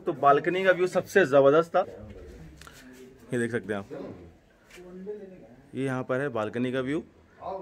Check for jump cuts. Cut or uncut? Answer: uncut